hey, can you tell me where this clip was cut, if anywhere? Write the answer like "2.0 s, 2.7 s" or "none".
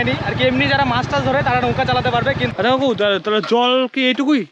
2.5 s